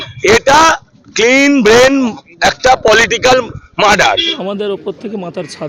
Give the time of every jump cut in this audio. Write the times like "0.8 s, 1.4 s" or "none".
4.3 s